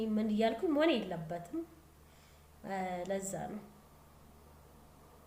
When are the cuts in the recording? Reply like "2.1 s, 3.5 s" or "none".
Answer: none